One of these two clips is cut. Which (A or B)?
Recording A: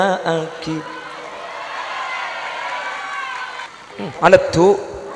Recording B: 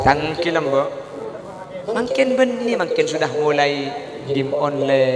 A